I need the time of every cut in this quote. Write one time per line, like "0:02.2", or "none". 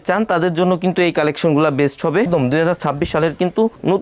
0:02.3